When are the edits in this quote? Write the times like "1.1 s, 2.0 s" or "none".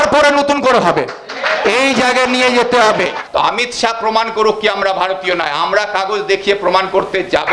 3.2 s